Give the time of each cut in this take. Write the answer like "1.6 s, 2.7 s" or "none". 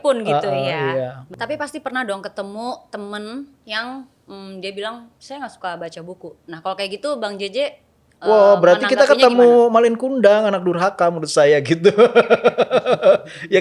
1.2 s